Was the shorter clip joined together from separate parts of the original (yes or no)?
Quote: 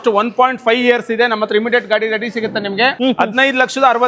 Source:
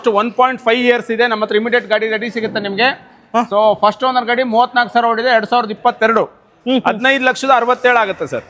yes